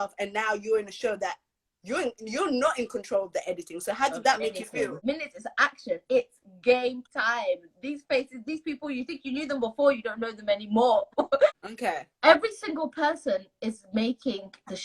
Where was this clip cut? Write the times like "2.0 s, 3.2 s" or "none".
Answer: 5.0 s, 11.6 s